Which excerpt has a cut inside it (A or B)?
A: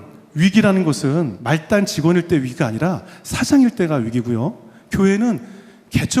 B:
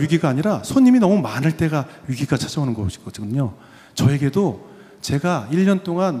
A